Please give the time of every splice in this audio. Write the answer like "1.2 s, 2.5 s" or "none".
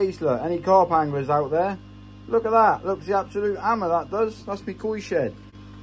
none

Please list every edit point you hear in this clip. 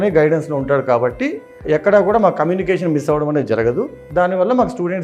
1.6 s

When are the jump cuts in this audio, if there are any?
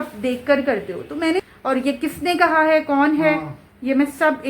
1.4 s

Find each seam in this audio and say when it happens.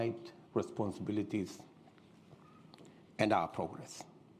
2.8 s

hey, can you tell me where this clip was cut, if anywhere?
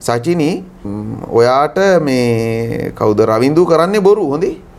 0.9 s

